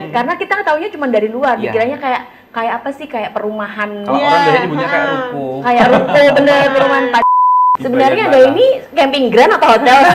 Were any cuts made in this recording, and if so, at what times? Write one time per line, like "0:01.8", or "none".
0:07.2